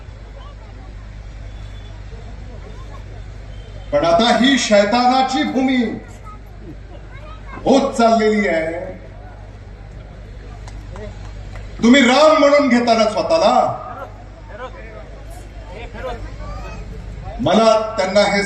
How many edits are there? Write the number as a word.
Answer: zero